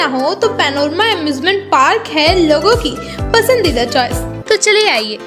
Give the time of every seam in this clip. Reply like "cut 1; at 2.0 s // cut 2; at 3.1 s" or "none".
cut 1; at 4.3 s